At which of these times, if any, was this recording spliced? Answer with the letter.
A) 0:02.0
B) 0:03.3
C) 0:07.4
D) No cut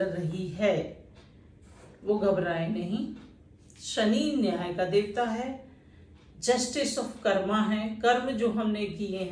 D